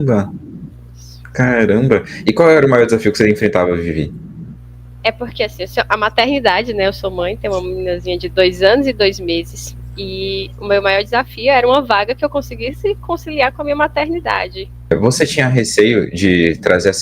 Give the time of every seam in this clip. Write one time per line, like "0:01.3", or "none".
0:14.9

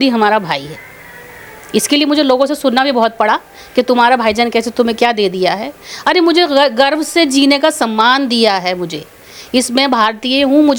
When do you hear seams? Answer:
none

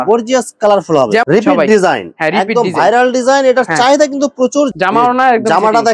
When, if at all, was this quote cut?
0:01.2
0:04.7

